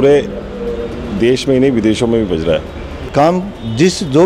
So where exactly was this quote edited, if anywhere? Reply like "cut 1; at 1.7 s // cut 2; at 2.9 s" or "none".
cut 1; at 3.1 s